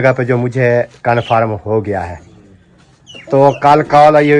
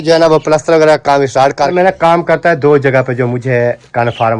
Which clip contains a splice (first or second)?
second